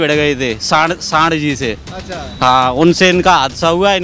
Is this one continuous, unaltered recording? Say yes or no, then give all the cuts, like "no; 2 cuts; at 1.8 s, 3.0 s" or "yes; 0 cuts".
yes; 0 cuts